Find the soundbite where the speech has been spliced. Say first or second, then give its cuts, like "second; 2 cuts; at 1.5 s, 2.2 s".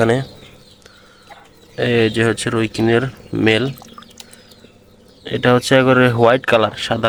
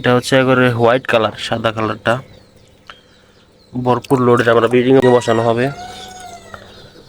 second; 1 cut; at 5.0 s